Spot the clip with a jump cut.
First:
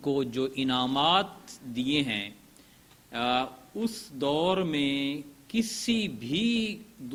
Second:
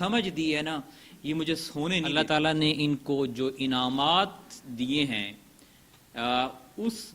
second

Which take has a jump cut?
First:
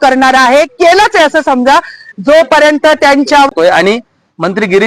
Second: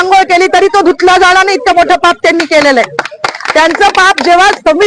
first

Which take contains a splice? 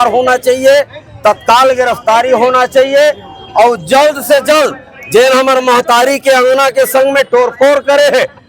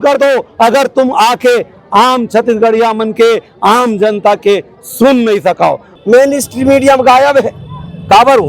second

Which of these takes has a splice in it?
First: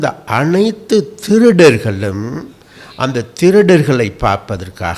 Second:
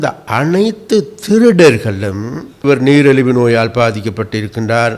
second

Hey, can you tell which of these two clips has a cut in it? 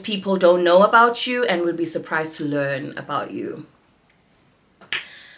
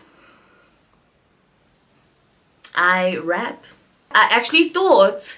second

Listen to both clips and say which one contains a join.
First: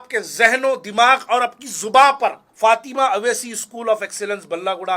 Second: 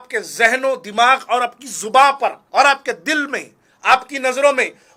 first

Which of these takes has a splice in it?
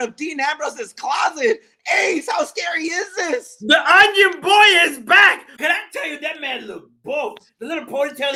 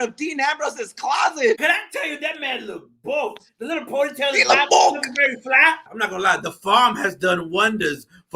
second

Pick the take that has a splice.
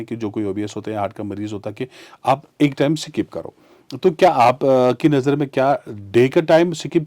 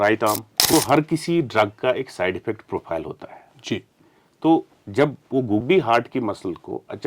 second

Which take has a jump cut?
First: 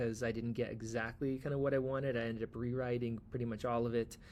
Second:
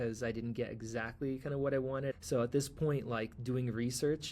second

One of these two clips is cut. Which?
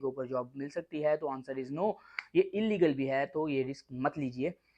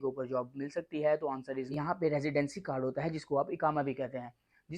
second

